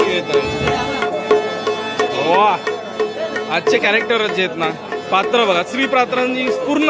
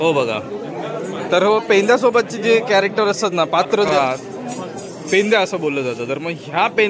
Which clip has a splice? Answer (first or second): second